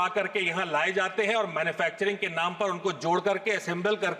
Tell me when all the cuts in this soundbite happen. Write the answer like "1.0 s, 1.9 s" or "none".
none